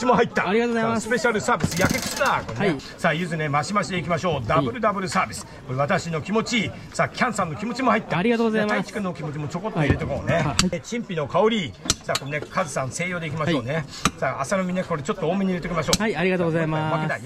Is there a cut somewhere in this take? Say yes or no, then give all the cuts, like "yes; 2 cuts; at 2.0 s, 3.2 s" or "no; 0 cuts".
yes; 2 cuts; at 2.9 s, 10.8 s